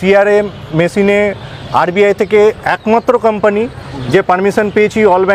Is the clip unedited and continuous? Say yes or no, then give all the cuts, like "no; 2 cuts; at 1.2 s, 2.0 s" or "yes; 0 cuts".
yes; 0 cuts